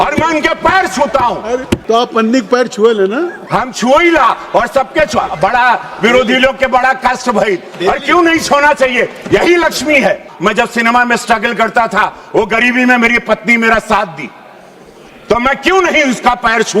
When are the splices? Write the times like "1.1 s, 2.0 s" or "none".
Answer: 1.8 s, 10.3 s